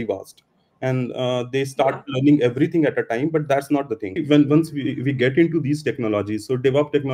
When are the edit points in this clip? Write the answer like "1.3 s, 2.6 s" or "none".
4.2 s